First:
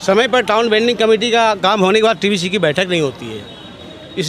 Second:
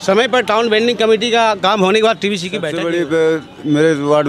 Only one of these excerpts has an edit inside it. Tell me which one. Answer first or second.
second